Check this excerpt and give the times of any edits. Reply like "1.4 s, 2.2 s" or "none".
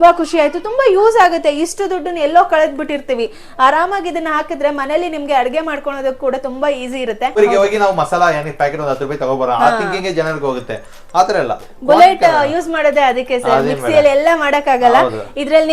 7.3 s